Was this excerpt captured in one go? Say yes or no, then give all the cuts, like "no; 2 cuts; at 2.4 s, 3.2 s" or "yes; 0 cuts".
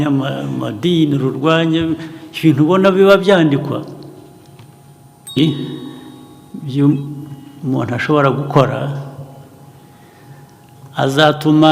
no; 1 cut; at 5.4 s